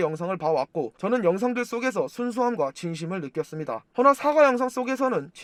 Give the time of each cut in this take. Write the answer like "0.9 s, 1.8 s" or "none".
none